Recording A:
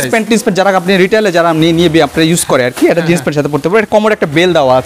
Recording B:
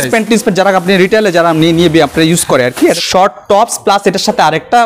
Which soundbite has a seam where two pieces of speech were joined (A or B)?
B